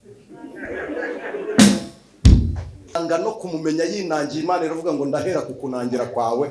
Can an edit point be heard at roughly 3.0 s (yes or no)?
yes